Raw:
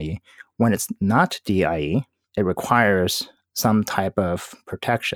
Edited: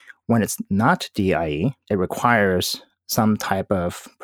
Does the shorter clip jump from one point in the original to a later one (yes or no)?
yes